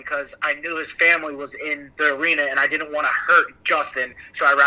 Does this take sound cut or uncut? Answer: cut